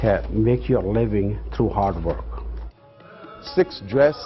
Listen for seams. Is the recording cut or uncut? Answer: uncut